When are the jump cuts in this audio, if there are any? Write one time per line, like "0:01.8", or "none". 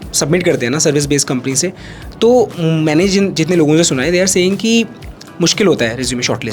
none